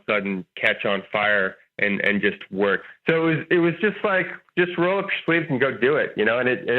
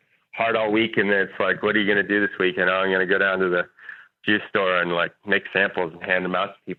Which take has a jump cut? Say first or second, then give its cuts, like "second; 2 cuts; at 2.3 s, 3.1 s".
first; 1 cut; at 2.8 s